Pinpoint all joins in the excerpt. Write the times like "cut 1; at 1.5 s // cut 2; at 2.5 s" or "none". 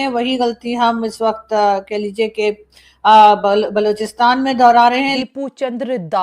cut 1; at 5.2 s